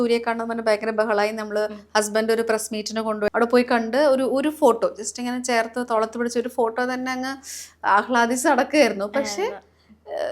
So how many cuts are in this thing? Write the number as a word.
one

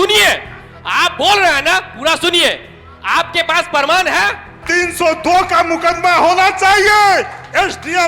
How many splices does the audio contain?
one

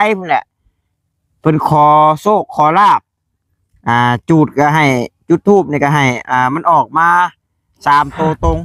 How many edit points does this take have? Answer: zero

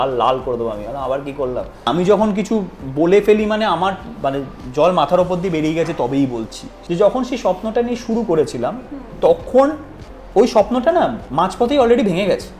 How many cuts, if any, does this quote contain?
two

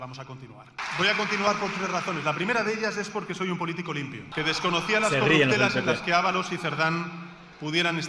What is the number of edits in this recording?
two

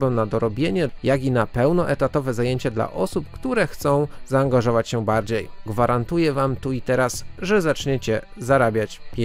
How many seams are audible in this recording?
two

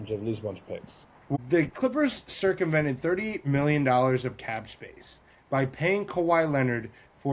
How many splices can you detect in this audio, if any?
one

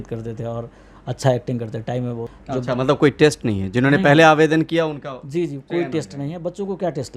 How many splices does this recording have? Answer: one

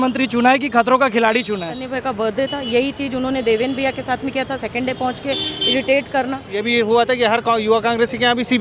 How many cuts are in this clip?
two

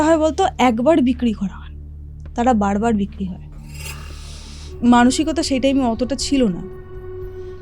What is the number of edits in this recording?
one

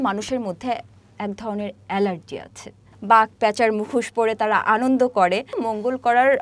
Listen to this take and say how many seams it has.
two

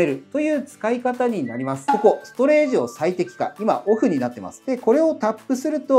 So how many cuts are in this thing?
one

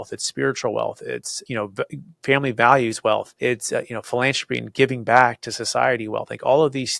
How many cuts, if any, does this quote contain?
two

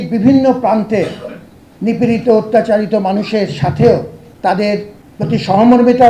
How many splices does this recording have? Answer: two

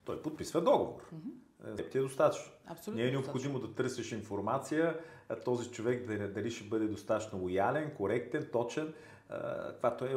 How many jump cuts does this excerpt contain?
one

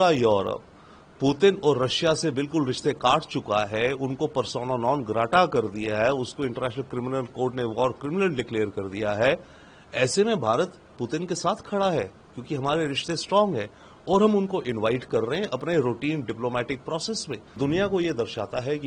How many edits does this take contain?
one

